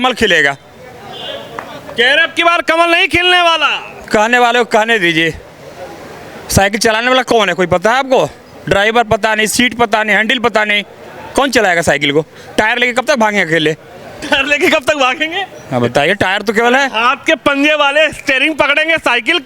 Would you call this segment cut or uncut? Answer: uncut